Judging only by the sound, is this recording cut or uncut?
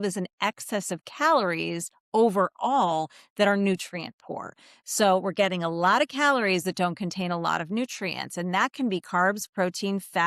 uncut